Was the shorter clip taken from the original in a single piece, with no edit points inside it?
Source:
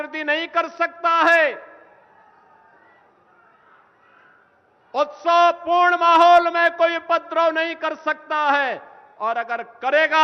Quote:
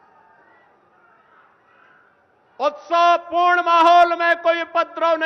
yes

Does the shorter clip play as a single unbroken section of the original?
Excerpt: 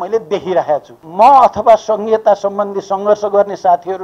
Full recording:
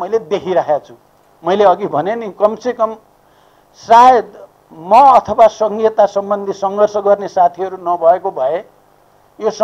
no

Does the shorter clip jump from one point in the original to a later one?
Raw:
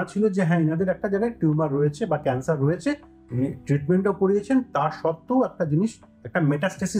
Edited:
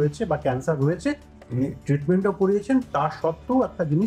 no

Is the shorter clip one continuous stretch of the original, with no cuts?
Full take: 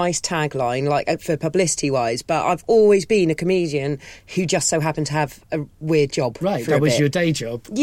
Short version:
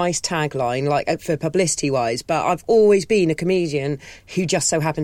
yes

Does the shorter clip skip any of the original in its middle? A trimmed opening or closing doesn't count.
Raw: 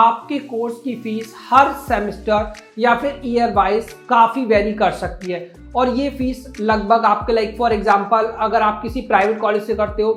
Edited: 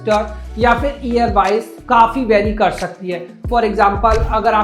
yes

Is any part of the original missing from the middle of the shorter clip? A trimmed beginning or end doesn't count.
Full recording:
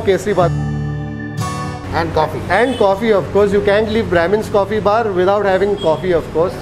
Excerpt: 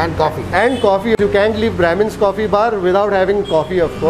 yes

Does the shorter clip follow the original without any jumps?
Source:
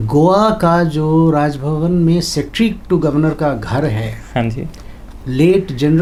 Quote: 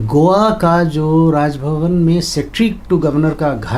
yes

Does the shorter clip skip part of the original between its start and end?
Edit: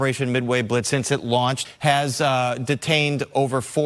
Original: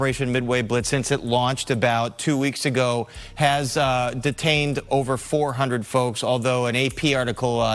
yes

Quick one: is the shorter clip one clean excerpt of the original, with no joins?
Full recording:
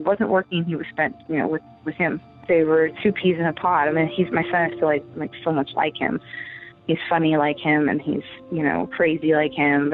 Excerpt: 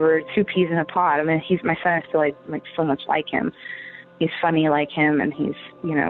yes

